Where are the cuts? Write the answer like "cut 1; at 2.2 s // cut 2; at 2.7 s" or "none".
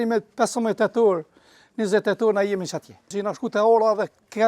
cut 1; at 3.2 s